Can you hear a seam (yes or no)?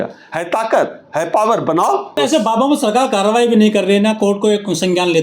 yes